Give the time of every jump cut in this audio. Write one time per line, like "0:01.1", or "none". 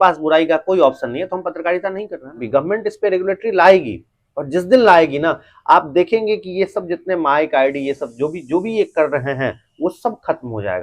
0:02.4